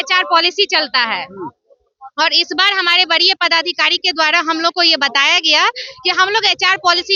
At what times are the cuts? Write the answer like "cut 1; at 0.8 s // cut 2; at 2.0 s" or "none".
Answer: none